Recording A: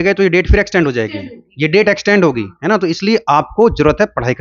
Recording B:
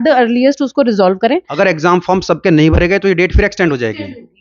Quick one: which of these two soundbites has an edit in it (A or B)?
B